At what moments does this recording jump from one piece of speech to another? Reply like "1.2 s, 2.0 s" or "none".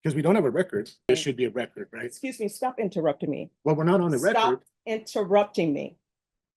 1.1 s

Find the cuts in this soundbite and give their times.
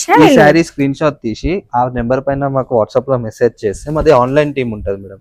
none

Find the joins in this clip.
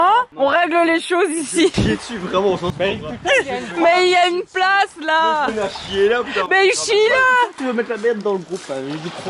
none

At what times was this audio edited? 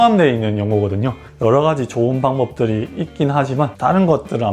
1.2 s, 3.7 s

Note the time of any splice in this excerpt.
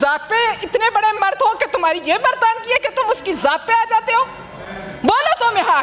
none

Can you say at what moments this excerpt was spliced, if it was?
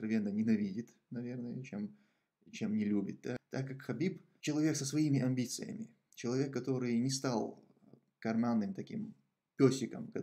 3.4 s, 4.3 s

